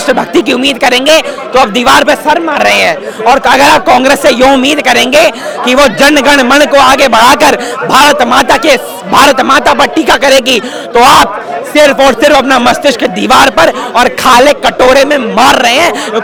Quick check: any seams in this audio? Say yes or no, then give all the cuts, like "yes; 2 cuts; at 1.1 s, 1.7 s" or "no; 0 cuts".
no; 0 cuts